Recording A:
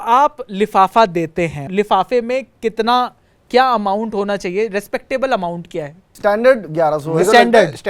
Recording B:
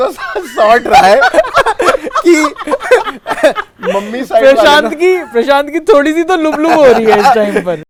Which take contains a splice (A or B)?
A